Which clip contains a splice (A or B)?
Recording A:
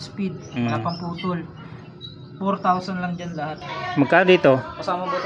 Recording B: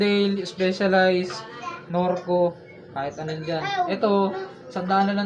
A